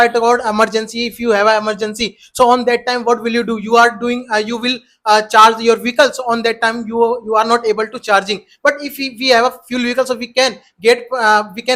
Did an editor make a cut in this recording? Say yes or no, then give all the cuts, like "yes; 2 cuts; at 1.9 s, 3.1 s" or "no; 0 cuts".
no; 0 cuts